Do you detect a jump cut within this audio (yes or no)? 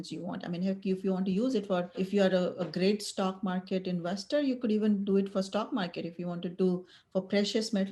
yes